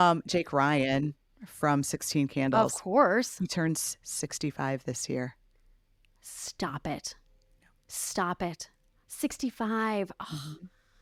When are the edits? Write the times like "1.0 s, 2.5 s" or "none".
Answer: none

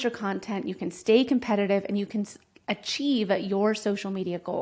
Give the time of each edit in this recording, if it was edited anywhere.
none

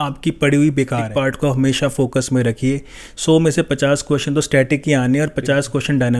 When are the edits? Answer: 1.1 s

